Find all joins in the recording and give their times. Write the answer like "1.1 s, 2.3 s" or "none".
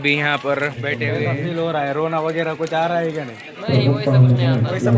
1.1 s